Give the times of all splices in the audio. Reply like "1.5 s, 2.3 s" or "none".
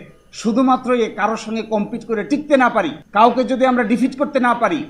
3.0 s